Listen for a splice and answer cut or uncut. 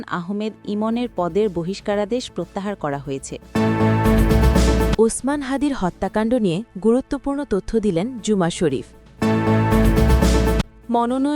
cut